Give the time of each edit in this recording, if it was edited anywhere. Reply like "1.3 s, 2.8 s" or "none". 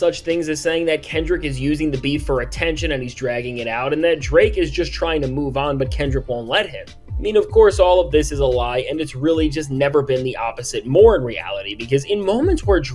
none